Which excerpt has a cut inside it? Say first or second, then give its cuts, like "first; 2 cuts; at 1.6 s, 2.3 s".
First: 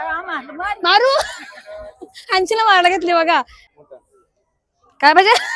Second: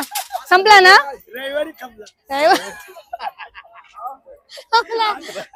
first; 1 cut; at 3.6 s